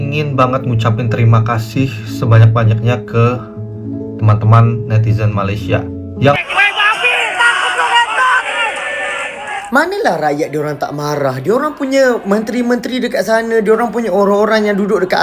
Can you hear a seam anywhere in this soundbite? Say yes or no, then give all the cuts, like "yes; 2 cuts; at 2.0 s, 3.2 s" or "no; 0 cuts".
yes; 2 cuts; at 6.4 s, 9.6 s